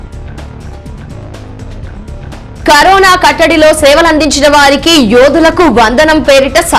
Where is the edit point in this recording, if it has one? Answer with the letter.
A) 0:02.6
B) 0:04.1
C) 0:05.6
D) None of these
A